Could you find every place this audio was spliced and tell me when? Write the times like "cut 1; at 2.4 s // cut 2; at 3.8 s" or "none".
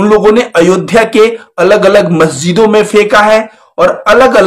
none